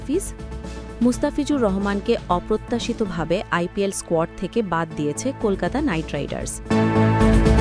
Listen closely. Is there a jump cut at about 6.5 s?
yes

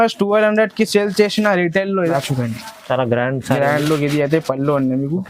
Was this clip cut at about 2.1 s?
yes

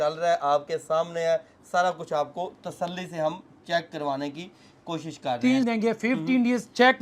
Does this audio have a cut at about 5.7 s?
yes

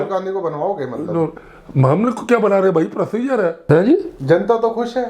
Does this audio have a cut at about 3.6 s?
yes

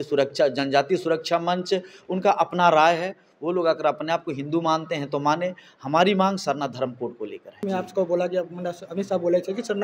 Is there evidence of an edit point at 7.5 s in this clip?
yes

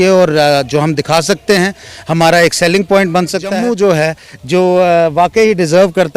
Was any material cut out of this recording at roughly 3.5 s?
yes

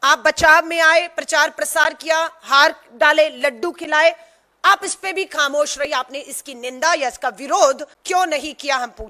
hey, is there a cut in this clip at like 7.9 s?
yes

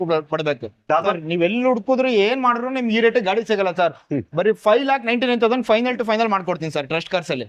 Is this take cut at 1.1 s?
yes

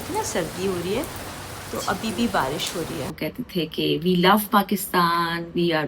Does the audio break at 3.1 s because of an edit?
yes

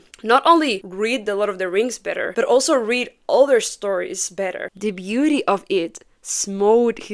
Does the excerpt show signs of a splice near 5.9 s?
no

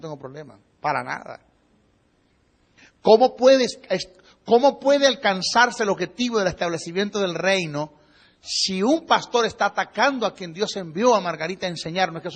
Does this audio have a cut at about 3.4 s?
no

